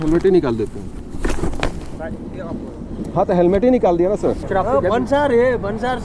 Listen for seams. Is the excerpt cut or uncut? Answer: cut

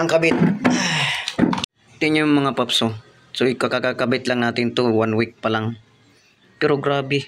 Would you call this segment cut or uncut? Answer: cut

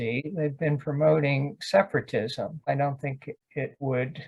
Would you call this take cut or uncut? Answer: cut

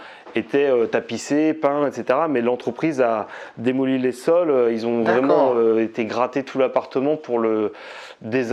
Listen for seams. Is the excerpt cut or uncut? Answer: uncut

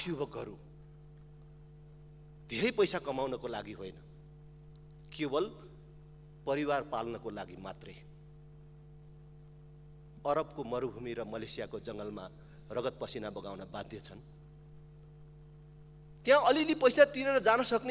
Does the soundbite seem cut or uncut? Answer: uncut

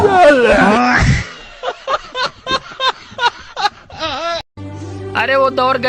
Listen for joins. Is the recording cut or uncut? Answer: cut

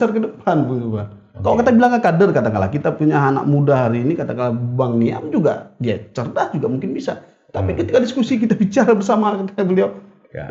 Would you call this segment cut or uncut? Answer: uncut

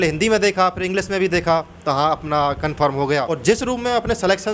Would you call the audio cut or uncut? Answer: cut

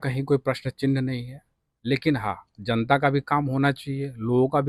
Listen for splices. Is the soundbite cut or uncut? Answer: uncut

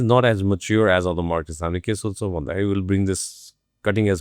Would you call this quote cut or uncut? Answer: uncut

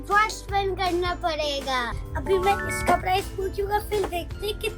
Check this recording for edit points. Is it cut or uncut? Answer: cut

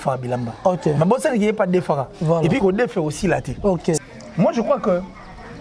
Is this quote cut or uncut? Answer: cut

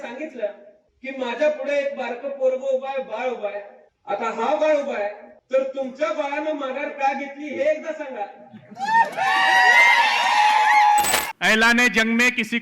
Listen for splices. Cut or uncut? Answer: cut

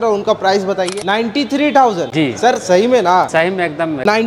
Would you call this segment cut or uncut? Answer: cut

